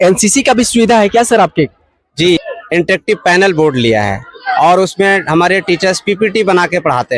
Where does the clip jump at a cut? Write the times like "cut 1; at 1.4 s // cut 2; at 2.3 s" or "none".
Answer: cut 1; at 2.4 s